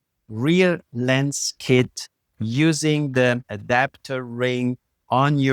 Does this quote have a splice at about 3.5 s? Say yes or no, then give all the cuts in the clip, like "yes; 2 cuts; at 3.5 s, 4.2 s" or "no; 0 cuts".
yes; 1 cut; at 3.5 s